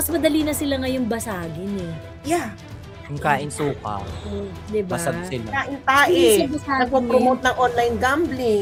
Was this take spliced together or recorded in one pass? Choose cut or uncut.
uncut